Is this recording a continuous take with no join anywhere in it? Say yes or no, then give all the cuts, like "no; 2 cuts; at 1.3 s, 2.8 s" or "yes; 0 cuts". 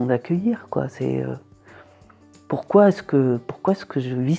yes; 0 cuts